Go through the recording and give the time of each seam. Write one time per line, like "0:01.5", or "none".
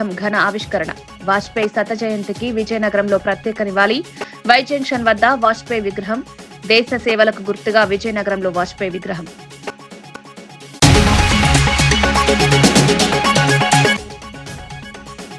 0:10.2